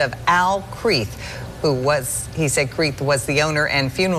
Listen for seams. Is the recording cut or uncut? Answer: uncut